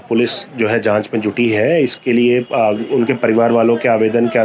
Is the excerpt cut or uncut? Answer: uncut